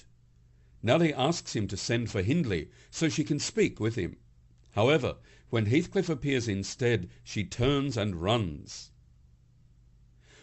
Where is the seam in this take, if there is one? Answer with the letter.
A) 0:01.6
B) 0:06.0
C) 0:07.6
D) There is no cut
C